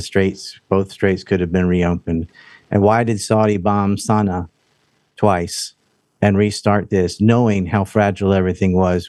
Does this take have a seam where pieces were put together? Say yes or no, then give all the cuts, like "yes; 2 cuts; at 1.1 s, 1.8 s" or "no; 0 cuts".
no; 0 cuts